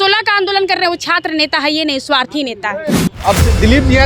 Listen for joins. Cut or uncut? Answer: cut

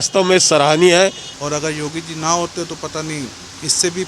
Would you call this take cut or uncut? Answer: cut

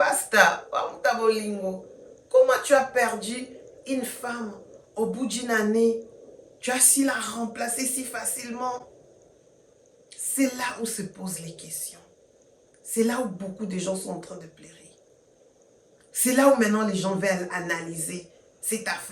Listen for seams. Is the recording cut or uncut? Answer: uncut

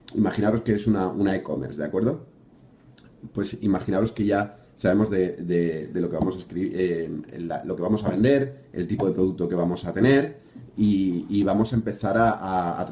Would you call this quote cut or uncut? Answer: cut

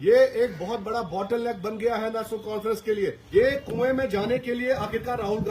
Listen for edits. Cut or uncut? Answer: cut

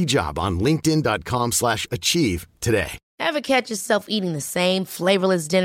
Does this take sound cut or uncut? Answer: cut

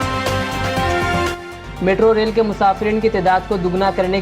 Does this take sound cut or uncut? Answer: cut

